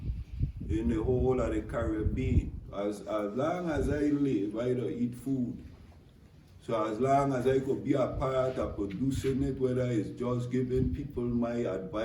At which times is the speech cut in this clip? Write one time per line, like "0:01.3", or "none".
0:02.6